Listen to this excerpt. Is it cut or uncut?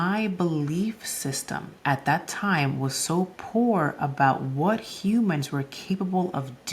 cut